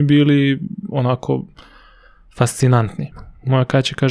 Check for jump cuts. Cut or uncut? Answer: cut